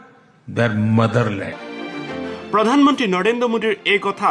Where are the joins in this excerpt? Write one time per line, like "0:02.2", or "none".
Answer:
0:01.2